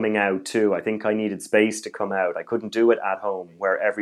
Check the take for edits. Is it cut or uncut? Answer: uncut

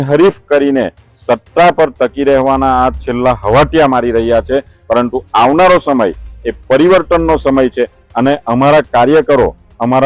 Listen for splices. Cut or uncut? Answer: uncut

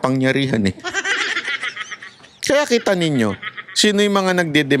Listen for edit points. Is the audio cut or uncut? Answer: uncut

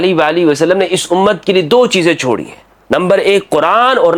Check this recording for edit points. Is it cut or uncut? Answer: uncut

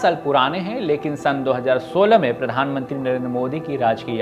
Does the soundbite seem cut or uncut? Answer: uncut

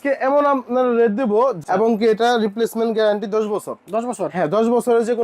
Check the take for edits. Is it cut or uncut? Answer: cut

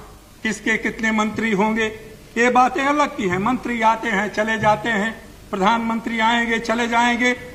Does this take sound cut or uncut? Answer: uncut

